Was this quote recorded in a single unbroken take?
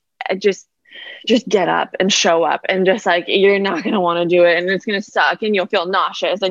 yes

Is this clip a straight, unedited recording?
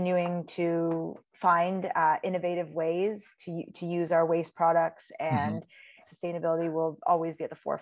no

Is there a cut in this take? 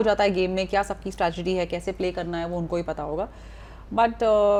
no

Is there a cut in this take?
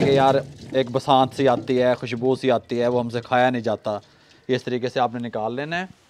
no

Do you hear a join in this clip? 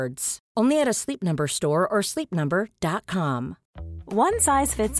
yes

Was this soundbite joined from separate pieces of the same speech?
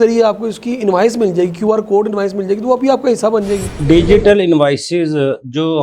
yes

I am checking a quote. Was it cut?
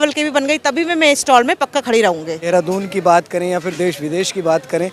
yes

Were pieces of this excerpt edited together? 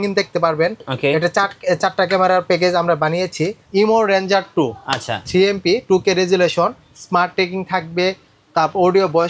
yes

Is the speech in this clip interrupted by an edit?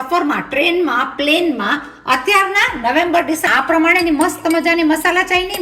yes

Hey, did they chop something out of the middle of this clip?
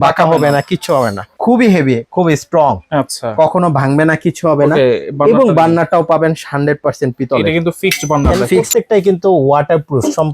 yes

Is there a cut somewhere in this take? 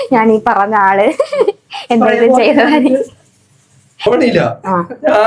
yes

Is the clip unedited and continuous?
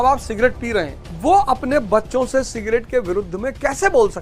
no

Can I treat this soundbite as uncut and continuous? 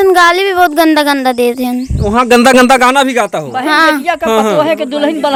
yes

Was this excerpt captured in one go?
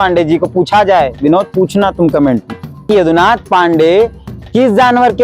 no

